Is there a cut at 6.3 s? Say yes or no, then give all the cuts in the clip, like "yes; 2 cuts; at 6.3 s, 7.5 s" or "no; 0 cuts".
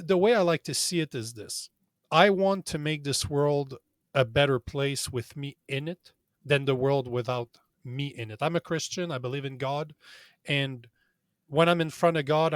yes; 1 cut; at 6.3 s